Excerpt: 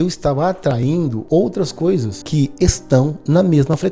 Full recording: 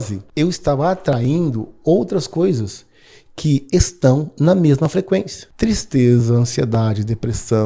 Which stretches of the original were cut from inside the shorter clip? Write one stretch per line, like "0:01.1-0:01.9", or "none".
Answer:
0:01.6-0:01.7
0:02.7-0:03.3

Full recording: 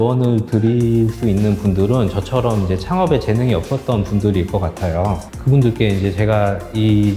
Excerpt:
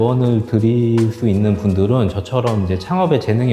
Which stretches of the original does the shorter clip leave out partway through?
none

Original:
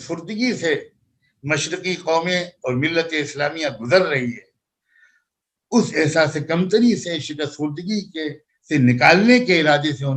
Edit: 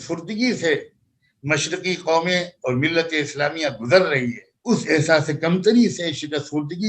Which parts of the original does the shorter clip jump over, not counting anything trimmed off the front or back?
0:04.5-0:05.6

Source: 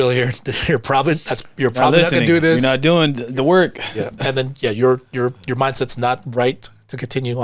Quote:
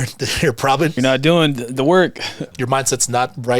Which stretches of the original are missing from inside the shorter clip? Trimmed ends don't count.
0:01.2-0:02.6
0:04.1-0:05.4

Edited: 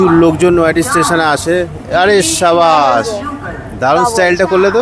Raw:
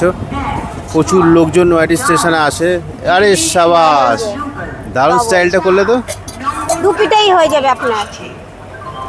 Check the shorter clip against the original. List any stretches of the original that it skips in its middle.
none

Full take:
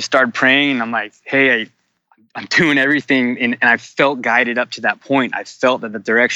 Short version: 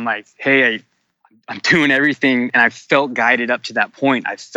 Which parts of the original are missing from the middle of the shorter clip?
0:03.4-0:03.6

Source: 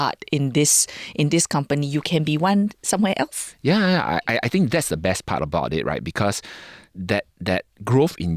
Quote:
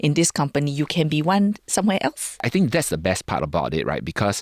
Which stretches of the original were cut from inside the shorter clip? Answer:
0:03.6-0:04.4

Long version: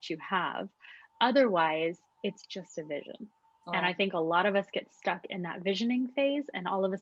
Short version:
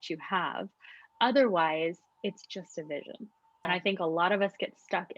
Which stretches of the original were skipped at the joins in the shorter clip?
0:03.7-0:03.8

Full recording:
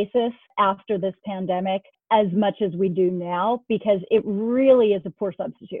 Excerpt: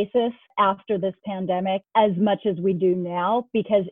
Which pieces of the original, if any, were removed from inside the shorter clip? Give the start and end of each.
0:01.9-0:02.0

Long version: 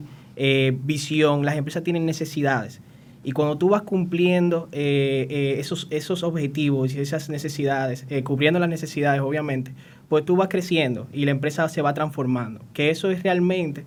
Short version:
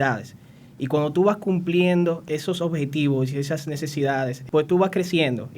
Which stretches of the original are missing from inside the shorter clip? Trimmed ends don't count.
0:04.7-0:05.9
0:08.0-0:10.0

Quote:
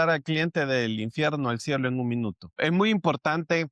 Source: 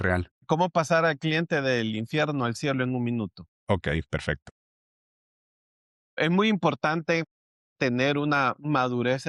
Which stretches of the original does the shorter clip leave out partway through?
0:03.4-0:06.0

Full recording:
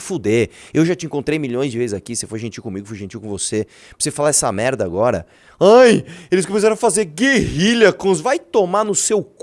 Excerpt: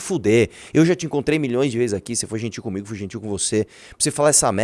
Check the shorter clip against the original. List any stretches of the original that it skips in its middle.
none

